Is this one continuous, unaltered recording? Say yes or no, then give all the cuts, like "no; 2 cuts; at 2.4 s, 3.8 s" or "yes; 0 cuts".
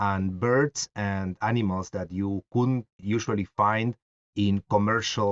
yes; 0 cuts